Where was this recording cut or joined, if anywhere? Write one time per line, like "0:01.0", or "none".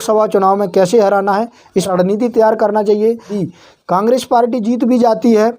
0:01.9
0:03.4